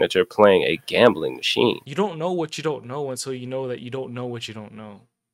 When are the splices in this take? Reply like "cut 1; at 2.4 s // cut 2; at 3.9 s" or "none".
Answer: cut 1; at 1.8 s